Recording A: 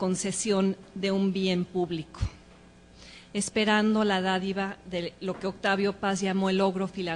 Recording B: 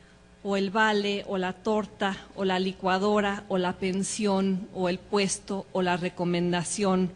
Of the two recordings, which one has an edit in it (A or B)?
B